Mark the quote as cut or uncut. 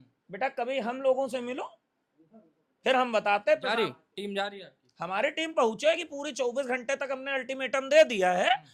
uncut